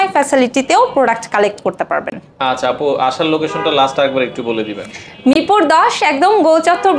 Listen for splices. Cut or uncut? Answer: uncut